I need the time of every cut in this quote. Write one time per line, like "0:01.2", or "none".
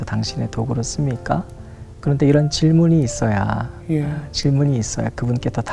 none